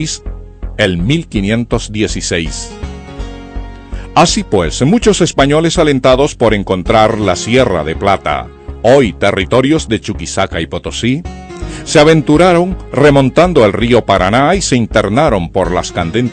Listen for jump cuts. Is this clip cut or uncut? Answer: uncut